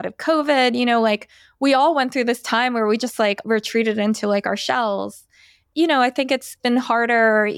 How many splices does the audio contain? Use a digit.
2